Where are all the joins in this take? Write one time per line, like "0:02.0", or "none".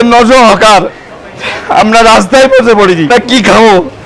0:03.1